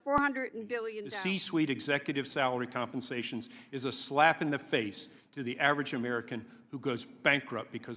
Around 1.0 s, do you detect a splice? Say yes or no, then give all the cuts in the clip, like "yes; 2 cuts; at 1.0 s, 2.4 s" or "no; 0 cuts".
yes; 1 cut; at 1.0 s